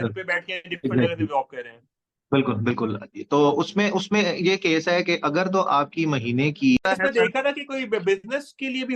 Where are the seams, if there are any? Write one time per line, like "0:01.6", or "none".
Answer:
0:06.8